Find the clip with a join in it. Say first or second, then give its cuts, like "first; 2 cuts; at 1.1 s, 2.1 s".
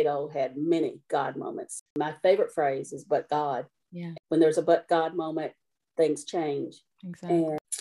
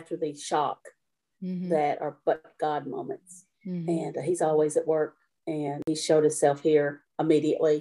first; 1 cut; at 1.7 s